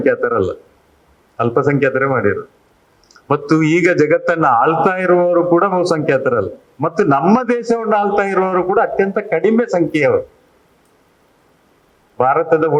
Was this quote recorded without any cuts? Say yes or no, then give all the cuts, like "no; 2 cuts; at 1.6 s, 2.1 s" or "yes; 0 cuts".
yes; 0 cuts